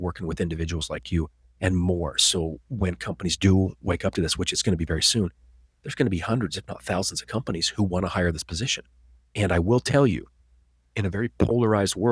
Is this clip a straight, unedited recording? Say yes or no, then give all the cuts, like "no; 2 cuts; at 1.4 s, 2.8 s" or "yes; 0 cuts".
yes; 0 cuts